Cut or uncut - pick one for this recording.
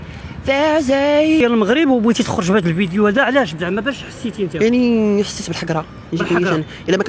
cut